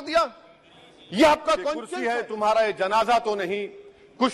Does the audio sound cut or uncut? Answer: cut